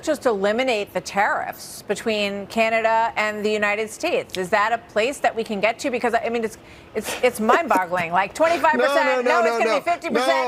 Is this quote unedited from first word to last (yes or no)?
yes